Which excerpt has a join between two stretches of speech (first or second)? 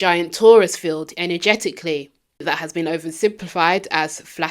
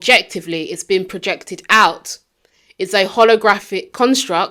first